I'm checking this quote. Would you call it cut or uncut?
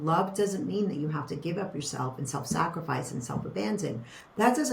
uncut